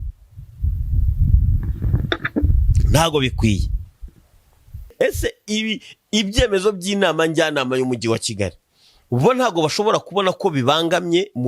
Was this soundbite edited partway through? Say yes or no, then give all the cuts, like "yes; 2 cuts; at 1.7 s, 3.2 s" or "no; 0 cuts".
yes; 1 cut; at 4.9 s